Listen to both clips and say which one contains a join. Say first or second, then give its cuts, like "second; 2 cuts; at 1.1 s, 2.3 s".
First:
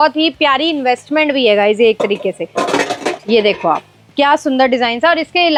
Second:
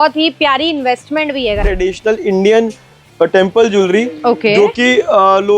second; 1 cut; at 1.6 s